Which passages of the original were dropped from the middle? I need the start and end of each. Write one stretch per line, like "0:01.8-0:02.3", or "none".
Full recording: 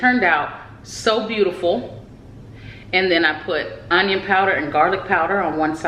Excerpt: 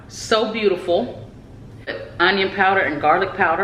0:02.8-0:03.7

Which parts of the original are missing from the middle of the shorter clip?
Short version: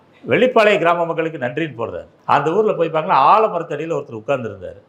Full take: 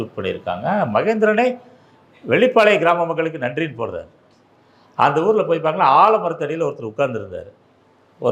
0:04.1-0:04.8

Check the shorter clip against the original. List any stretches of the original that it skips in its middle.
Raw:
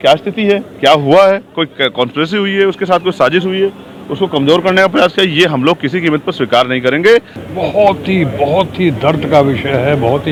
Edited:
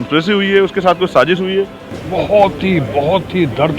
0:04.0-0:07.4

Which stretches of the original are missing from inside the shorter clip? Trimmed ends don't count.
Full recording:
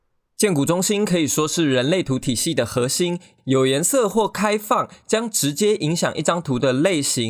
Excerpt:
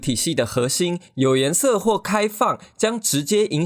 0:03.2-0:03.3

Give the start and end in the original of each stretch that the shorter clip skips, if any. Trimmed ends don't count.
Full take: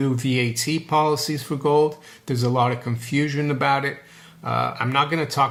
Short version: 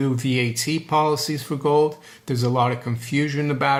none

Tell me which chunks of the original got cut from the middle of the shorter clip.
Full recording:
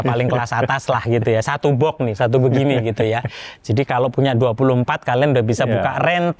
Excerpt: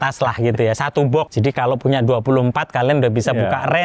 0:02.0-0:03.6

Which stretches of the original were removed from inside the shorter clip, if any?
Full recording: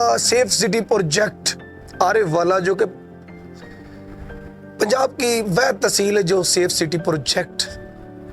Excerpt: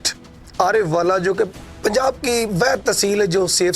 0:03.0-0:04.6

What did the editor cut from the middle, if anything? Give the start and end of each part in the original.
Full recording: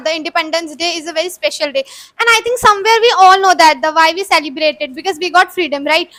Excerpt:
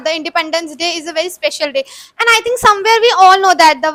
none

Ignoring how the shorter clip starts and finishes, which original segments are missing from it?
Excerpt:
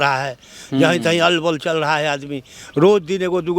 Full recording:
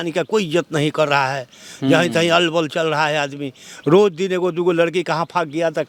none

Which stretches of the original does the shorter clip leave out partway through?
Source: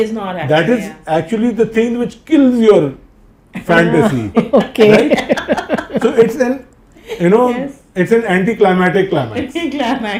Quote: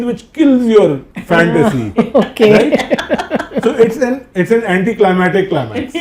0:03.0-0:03.5
0:06.6-0:07.8

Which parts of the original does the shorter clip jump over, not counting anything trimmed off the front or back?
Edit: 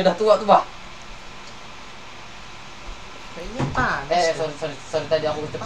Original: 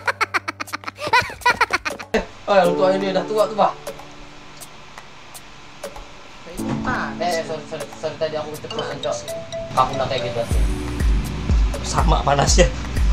none

